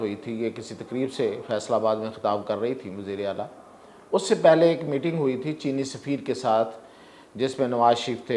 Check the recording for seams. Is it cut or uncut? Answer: uncut